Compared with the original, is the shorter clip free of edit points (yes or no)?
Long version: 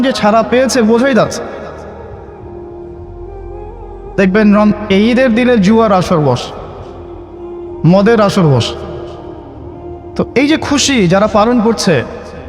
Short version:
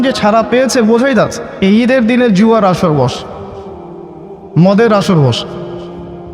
no